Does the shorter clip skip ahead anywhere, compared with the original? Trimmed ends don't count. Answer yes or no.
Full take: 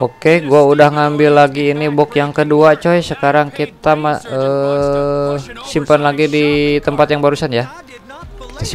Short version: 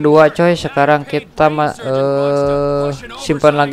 no